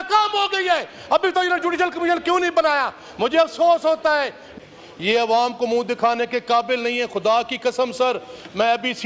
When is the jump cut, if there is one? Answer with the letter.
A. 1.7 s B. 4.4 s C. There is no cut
B